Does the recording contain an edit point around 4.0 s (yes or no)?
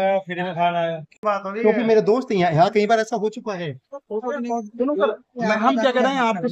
no